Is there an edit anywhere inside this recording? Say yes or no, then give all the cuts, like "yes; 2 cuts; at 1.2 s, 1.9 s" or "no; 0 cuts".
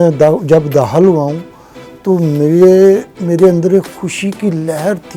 no; 0 cuts